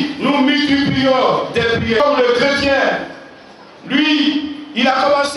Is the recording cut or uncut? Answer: cut